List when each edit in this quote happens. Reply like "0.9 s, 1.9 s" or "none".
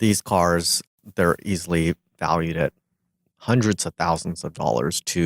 0.9 s